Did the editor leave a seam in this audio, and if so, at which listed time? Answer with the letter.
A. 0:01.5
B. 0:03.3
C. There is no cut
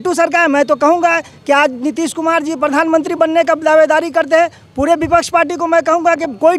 C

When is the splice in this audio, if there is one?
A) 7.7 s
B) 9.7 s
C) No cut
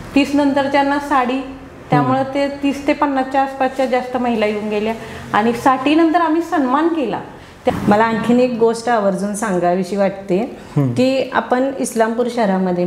A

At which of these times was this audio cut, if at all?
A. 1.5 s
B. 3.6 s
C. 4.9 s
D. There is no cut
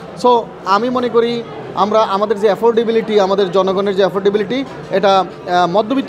D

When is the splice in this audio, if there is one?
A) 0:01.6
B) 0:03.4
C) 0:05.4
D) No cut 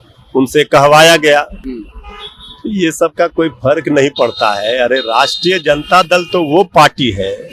D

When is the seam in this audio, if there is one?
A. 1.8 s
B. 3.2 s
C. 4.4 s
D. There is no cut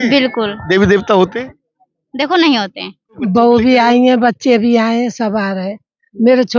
B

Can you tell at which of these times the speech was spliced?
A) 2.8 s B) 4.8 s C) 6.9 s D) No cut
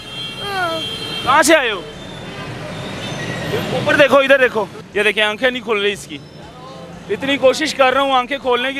B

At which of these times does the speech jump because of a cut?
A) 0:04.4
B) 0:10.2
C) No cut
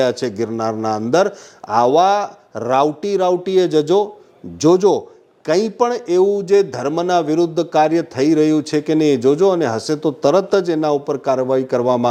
C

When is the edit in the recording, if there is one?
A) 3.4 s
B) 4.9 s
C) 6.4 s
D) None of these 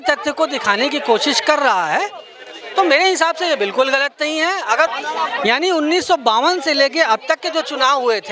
B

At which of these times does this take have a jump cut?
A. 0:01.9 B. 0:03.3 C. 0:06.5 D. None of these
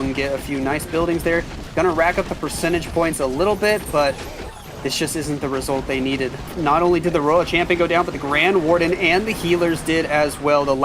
C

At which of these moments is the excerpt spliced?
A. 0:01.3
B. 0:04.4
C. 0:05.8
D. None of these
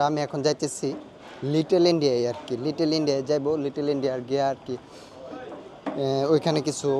D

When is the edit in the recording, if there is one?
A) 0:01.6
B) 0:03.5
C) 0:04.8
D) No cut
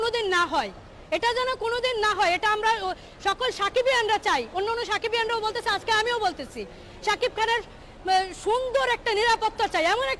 D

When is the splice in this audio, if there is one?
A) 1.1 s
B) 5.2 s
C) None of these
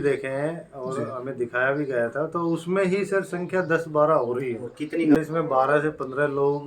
B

